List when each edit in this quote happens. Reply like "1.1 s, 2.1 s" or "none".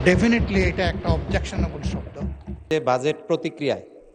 2.6 s